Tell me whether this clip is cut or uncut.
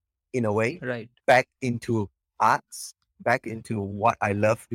uncut